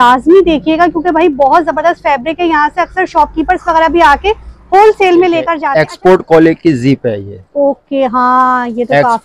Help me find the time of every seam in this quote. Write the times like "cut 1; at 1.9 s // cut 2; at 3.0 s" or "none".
cut 1; at 5.6 s